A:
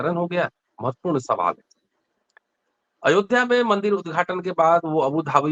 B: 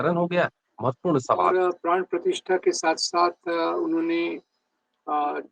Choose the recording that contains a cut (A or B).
B